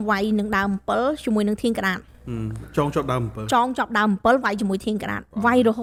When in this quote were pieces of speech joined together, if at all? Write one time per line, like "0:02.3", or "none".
none